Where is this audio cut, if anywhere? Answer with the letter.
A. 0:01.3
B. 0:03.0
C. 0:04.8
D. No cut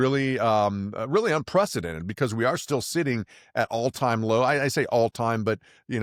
D